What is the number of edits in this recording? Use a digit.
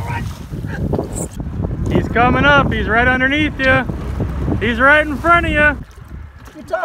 2